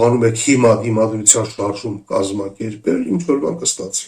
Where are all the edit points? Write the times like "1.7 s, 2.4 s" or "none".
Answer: none